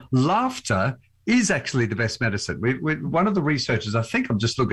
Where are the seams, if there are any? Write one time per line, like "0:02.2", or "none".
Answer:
none